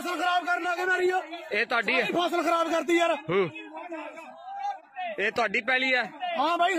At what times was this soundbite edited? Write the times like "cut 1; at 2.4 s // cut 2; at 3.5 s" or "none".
cut 1; at 4.9 s